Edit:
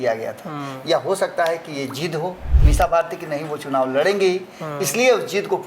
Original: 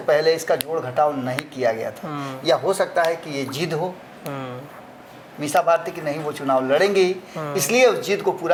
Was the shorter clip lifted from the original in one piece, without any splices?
no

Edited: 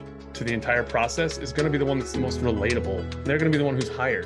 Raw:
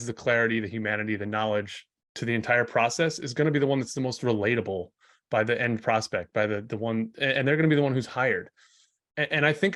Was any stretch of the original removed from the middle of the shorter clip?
yes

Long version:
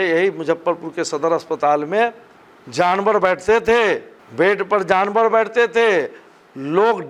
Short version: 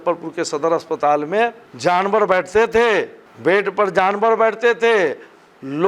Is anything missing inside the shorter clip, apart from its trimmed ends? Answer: yes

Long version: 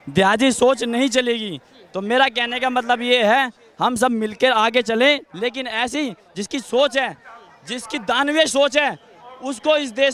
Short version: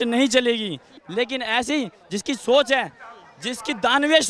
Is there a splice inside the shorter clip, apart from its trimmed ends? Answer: yes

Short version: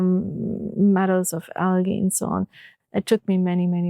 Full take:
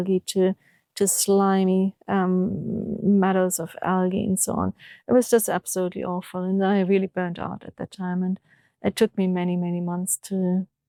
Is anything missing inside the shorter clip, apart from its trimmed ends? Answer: yes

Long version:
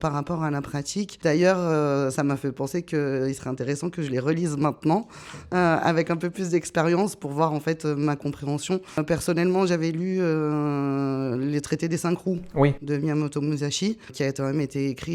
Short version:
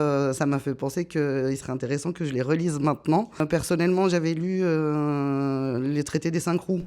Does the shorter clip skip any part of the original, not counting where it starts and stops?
yes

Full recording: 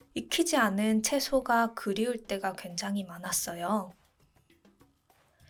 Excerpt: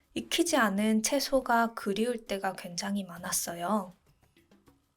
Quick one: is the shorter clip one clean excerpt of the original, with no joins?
no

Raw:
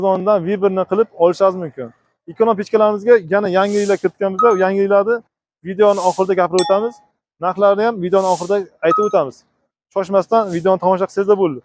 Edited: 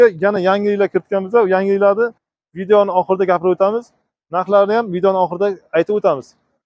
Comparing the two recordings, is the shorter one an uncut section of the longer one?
yes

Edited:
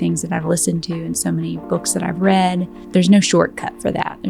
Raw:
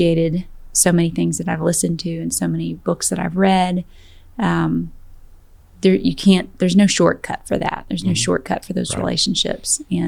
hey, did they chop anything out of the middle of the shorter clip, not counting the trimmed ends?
yes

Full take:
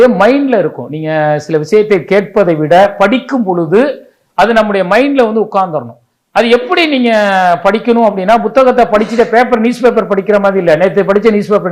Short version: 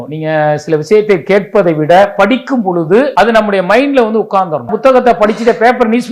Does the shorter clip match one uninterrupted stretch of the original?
no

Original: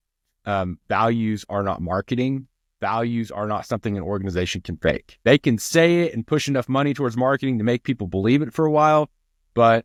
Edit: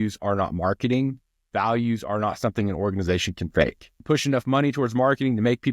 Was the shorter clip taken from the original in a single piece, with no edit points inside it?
no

